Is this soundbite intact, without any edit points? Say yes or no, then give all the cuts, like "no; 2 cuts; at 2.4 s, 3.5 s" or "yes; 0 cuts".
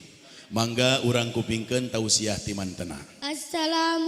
no; 1 cut; at 3.1 s